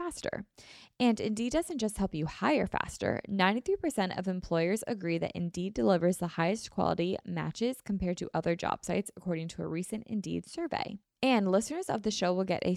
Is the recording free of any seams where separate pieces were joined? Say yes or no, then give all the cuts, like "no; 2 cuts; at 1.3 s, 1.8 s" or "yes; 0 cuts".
no; 1 cut; at 11.0 s